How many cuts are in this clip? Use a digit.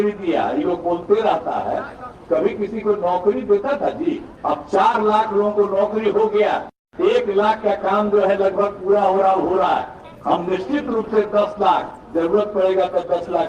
2